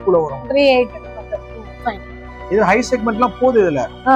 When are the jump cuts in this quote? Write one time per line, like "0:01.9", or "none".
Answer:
none